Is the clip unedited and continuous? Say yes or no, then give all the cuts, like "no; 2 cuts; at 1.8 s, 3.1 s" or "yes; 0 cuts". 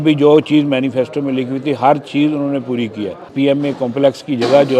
no; 1 cut; at 3.3 s